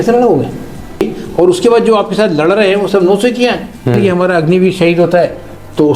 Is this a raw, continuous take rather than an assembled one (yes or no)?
no